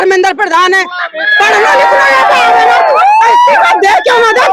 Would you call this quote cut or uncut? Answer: uncut